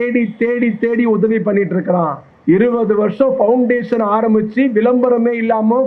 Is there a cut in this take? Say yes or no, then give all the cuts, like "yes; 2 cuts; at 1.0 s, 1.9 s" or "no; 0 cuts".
yes; 1 cut; at 2.3 s